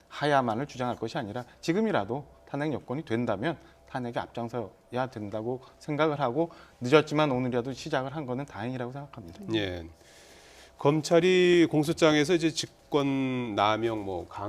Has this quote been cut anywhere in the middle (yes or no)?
no